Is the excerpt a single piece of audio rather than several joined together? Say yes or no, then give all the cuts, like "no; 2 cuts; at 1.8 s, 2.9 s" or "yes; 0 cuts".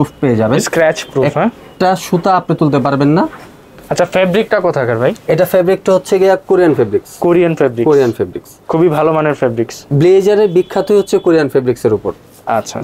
yes; 0 cuts